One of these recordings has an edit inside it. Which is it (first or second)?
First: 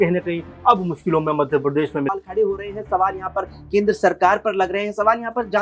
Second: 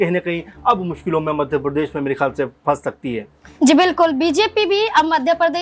first